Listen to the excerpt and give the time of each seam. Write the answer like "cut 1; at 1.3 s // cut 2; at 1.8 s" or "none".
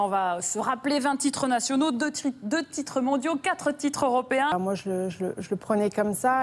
cut 1; at 3.6 s